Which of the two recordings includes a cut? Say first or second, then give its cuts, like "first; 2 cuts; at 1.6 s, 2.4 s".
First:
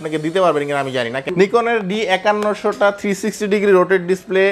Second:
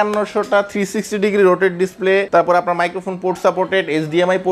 first; 1 cut; at 1.2 s